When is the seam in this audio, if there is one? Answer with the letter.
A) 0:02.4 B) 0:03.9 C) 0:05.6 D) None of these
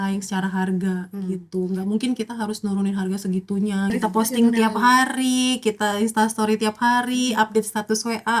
B